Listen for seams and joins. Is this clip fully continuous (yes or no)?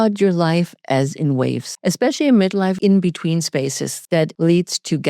no